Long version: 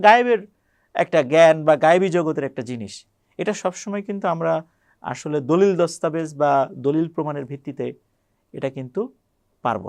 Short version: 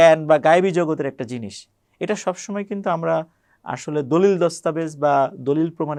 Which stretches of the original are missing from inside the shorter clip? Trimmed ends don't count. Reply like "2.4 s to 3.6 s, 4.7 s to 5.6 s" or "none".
none